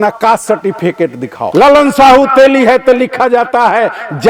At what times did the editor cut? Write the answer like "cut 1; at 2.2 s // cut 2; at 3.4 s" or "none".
cut 1; at 1.4 s